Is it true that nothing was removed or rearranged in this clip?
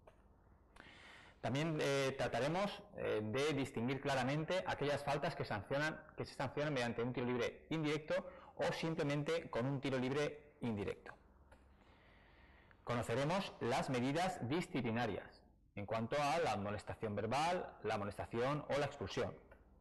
yes; 0 cuts

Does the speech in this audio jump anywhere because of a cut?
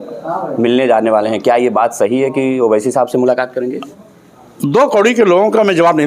yes; 1 cut; at 3.9 s

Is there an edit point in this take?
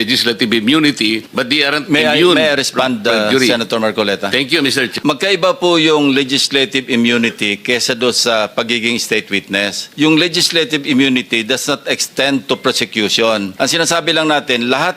yes; 4 cuts; at 1.3 s, 4.9 s, 9.8 s, 13.5 s

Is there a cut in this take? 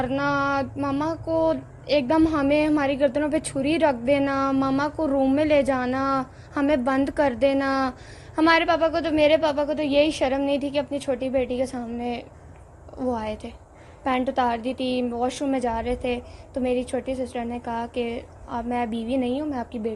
no; 0 cuts

